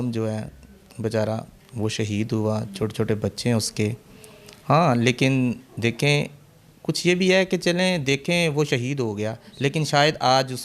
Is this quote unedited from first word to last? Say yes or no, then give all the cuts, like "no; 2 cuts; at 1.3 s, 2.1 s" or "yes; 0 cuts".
yes; 0 cuts